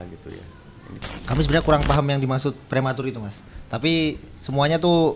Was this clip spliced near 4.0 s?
no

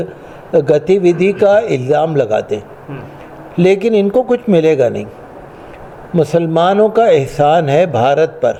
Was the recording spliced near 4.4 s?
no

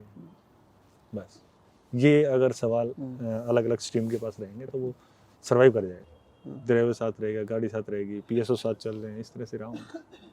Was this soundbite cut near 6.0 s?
yes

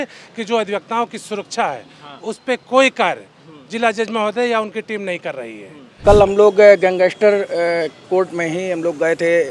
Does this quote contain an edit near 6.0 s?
yes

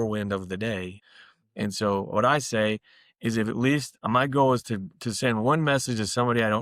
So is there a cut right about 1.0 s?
yes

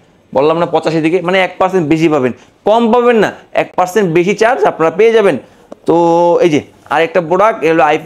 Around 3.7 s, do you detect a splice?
no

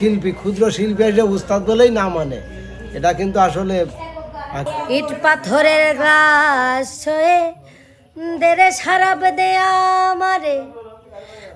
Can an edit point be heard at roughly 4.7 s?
yes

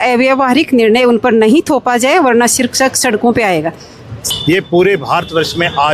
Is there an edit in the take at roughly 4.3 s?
yes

